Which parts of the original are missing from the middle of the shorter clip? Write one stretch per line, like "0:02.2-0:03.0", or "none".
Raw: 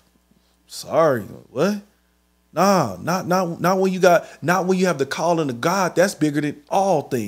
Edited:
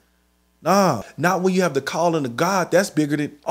0:03.0-0:04.3